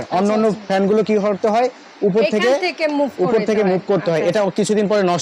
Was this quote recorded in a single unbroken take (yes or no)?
yes